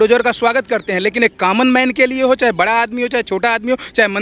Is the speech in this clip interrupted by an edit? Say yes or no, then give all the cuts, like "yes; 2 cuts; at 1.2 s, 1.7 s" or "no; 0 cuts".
no; 0 cuts